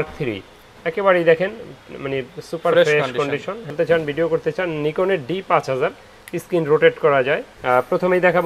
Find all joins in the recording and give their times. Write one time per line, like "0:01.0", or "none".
0:03.7
0:07.5